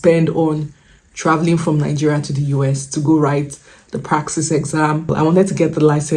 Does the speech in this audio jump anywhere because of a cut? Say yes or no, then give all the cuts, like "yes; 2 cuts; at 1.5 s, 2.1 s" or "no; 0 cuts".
no; 0 cuts